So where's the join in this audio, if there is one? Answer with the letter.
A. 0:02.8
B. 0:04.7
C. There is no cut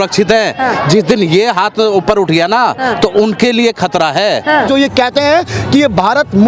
B